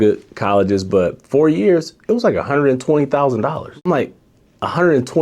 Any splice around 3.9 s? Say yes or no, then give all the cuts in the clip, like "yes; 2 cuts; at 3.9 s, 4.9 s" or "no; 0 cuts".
yes; 1 cut; at 3.9 s